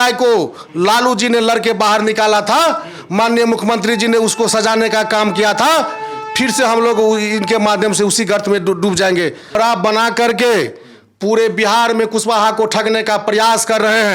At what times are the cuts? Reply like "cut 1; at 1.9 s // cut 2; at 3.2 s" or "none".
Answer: cut 1; at 9.6 s